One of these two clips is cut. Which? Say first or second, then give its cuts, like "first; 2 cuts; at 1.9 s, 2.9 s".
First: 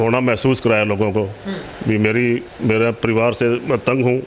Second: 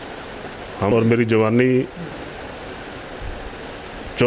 second; 1 cut; at 0.9 s